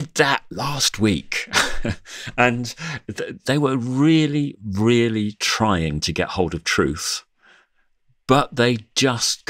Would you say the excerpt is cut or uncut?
cut